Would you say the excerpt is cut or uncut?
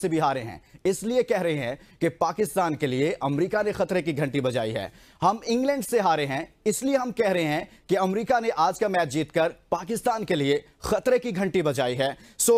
uncut